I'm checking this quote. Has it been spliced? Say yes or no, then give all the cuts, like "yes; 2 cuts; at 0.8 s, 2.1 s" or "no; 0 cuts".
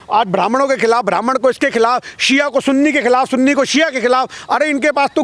no; 0 cuts